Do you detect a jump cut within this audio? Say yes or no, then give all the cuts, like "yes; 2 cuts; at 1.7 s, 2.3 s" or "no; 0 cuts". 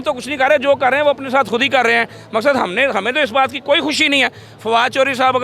no; 0 cuts